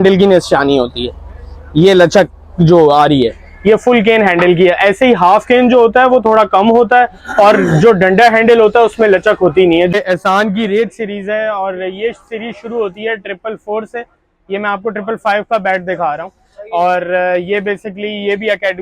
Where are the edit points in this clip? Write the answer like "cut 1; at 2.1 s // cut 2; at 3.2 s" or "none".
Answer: cut 1; at 9.9 s